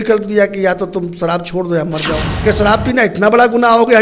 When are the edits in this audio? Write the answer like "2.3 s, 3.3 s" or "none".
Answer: 2.2 s